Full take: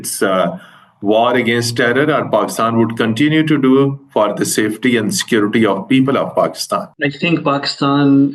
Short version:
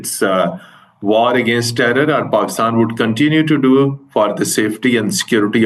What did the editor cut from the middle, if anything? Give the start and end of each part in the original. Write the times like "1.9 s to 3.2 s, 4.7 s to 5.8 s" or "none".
none